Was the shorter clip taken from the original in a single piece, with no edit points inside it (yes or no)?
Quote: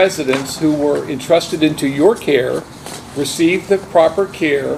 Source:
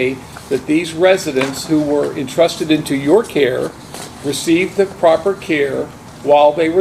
yes